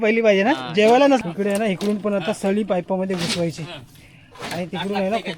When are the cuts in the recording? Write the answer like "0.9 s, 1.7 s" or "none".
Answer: 1.2 s